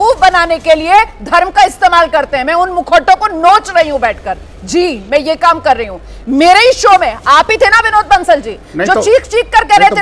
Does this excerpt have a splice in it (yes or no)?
no